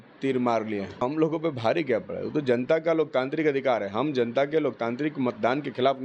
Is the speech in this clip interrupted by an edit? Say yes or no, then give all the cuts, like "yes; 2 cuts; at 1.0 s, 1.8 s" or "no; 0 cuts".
yes; 1 cut; at 0.9 s